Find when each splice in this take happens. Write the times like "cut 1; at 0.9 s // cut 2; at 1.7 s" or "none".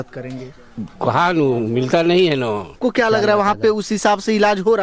cut 1; at 2.7 s